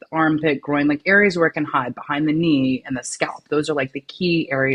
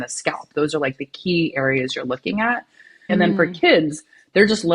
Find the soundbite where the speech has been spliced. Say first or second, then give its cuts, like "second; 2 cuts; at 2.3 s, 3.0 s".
second; 1 cut; at 3.1 s